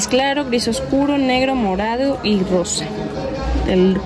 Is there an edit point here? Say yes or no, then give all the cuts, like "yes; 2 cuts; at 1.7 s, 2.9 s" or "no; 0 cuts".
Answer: no; 0 cuts